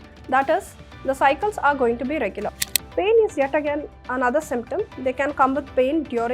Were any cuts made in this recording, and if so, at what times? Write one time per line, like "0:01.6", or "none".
0:02.6

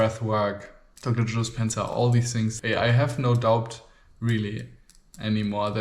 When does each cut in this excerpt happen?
0:02.6

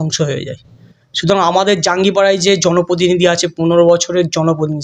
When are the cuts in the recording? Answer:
none

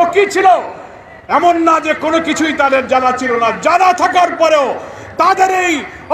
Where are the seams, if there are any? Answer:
none

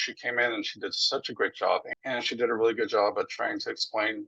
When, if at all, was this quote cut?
0:01.9

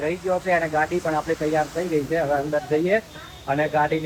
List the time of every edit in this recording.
none

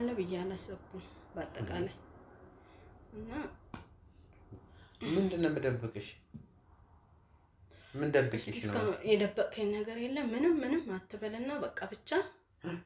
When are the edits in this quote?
none

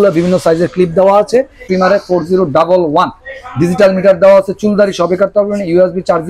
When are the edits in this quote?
0:01.6

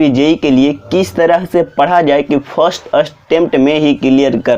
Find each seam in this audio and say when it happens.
none

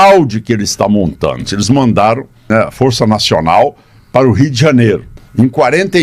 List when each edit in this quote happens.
0:01.4
0:02.4

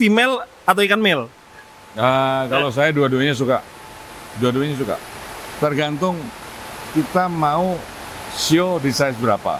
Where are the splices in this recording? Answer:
none

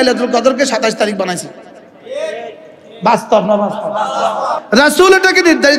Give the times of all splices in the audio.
0:04.6

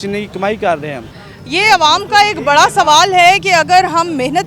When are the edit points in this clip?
none

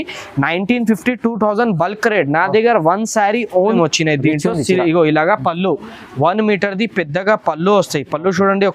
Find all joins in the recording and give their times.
0:03.8

